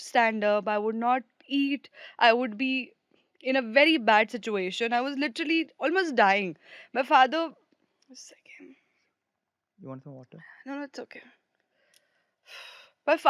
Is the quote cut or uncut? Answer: uncut